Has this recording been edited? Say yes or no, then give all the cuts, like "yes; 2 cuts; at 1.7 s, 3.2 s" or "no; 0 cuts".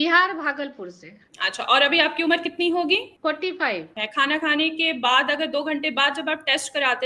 yes; 1 cut; at 3.9 s